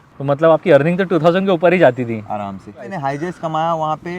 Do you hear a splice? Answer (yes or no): yes